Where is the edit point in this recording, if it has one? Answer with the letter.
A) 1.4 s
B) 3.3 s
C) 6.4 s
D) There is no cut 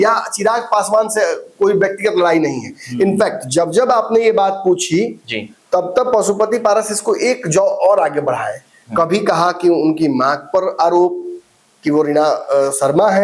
D